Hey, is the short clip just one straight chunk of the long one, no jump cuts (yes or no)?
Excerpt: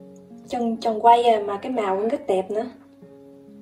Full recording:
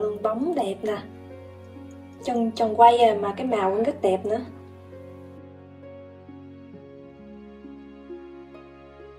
no